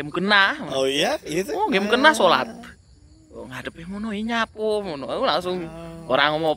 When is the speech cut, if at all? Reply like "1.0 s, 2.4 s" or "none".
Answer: none